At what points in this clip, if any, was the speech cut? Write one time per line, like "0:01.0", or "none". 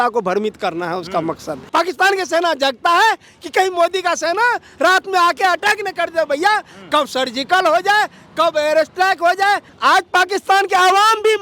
0:01.7
0:09.7